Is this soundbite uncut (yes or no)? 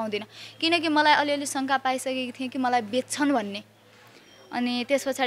yes